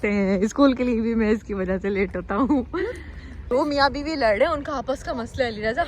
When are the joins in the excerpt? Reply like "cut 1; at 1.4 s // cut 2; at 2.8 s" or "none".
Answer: cut 1; at 3.0 s